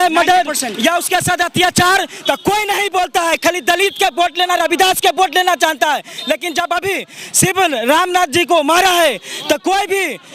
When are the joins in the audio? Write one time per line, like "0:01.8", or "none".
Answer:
none